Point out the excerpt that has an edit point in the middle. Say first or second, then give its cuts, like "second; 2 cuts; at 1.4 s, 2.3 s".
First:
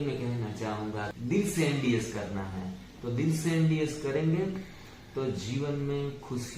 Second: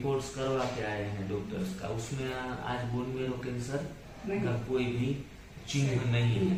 first; 1 cut; at 1.1 s